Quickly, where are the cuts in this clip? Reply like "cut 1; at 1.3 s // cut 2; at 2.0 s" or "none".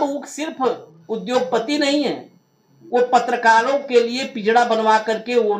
none